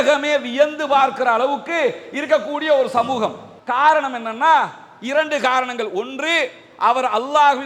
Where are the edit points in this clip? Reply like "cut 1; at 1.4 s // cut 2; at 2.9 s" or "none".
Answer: cut 1; at 3.6 s